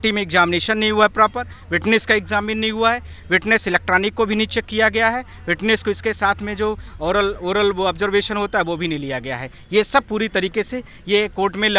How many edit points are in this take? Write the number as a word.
zero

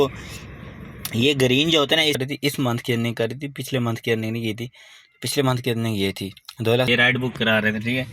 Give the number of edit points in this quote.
two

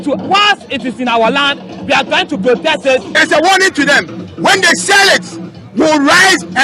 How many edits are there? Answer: one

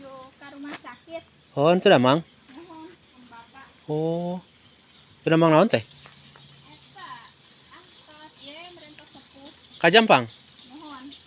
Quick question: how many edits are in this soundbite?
zero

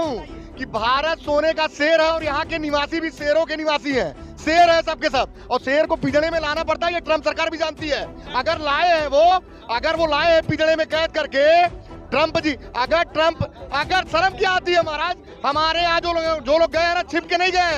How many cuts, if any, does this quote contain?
zero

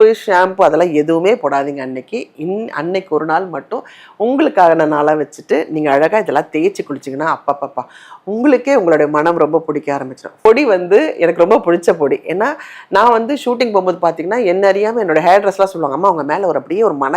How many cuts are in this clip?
one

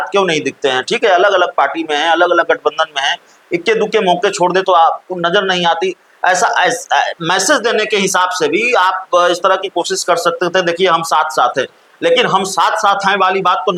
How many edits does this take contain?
zero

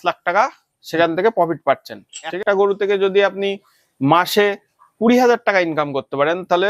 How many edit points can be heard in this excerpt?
one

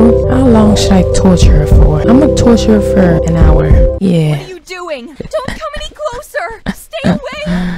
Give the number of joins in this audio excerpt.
one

